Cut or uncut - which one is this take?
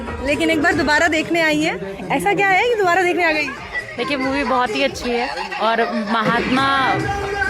uncut